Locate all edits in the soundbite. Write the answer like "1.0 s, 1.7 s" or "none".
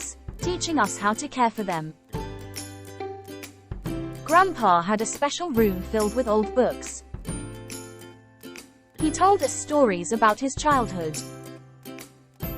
2.0 s, 3.5 s, 4.2 s